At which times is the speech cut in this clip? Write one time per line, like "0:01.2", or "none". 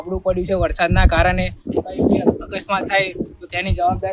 0:01.6